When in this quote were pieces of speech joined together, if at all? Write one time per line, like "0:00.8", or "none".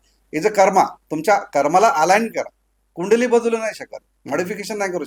none